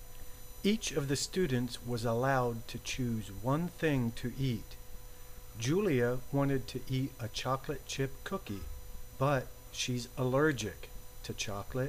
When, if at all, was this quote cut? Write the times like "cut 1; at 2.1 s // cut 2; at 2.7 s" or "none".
none